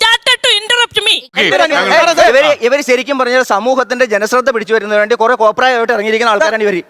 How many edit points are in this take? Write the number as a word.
one